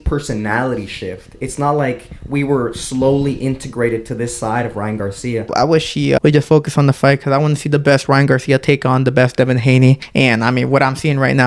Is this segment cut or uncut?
cut